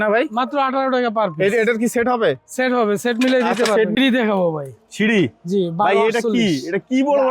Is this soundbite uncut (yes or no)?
no